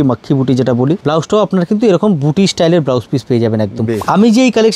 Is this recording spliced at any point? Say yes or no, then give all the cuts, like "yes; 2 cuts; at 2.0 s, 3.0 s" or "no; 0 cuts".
yes; 2 cuts; at 1.0 s, 4.0 s